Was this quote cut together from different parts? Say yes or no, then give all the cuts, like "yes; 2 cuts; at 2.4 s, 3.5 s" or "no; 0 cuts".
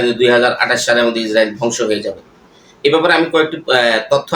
no; 0 cuts